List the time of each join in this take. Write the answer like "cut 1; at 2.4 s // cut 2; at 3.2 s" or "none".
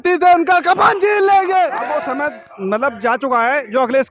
cut 1; at 1.9 s